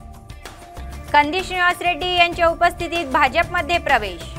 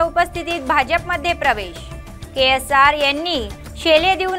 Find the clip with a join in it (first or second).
first